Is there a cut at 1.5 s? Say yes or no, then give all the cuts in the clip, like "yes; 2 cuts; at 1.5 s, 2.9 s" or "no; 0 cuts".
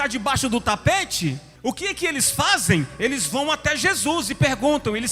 yes; 1 cut; at 1.5 s